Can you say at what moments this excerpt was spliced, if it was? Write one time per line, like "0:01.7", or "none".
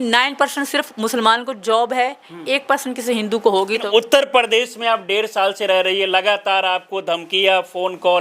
0:03.8